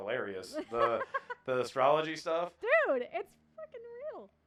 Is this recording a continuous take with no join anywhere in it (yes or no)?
yes